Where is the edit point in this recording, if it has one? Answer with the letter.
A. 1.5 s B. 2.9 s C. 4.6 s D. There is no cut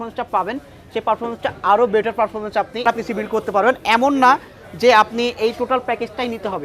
B